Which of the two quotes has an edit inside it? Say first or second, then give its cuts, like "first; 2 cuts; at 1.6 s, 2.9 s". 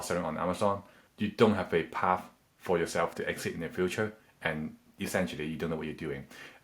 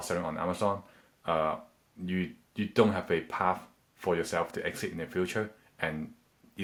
first; 2 cuts; at 1.0 s, 4.8 s